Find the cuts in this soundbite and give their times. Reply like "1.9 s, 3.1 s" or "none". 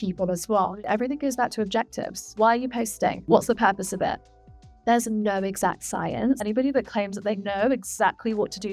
0.8 s, 2.3 s, 3.2 s, 6.4 s